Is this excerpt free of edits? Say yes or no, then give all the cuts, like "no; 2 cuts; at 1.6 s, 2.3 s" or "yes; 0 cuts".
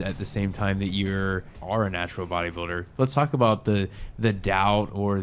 yes; 0 cuts